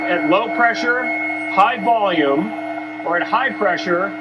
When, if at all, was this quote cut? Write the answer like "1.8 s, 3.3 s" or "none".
none